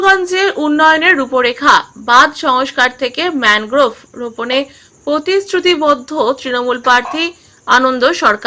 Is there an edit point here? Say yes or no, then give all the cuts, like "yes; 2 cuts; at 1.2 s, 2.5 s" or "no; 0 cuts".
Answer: no; 0 cuts